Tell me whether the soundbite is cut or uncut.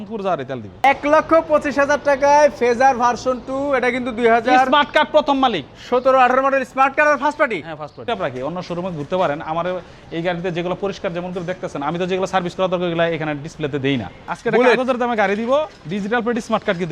cut